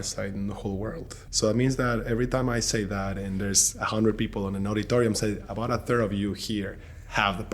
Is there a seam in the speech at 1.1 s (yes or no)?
yes